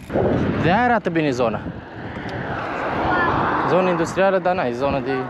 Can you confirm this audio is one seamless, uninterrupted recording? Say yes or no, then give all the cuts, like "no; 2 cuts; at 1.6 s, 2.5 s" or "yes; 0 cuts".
yes; 0 cuts